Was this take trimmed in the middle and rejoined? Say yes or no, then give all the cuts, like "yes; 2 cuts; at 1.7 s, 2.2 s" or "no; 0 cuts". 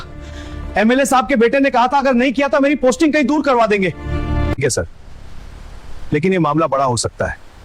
yes; 1 cut; at 4.6 s